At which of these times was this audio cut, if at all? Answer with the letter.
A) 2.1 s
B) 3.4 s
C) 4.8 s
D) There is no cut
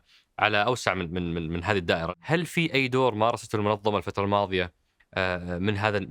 A